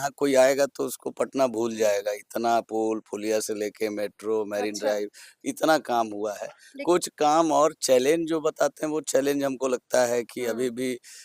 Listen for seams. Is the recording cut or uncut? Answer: uncut